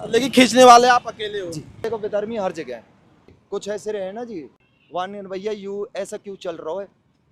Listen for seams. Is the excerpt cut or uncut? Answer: cut